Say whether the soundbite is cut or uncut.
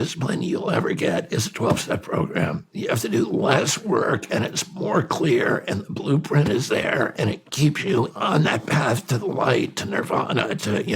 cut